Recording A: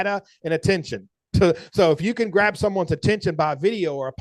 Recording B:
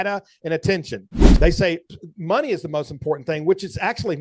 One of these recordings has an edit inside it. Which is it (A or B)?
B